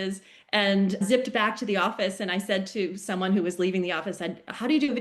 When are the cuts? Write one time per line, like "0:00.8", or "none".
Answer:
0:01.0